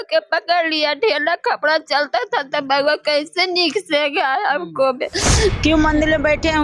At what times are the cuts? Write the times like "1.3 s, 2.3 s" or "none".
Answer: 5.6 s